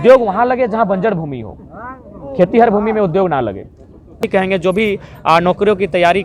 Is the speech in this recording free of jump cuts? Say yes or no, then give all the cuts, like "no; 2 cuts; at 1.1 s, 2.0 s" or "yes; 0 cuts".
no; 1 cut; at 4.2 s